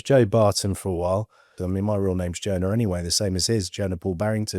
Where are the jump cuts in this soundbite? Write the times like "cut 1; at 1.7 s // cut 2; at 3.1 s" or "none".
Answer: cut 1; at 1.6 s